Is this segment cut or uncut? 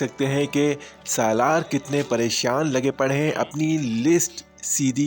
uncut